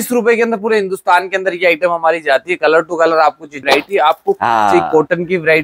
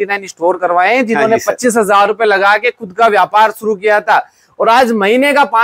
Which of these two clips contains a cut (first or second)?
first